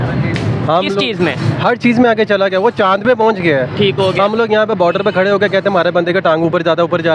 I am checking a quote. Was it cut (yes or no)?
no